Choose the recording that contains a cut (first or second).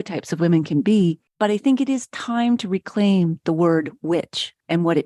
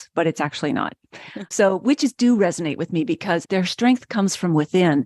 second